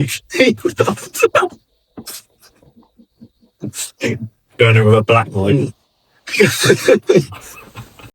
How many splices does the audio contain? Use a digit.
0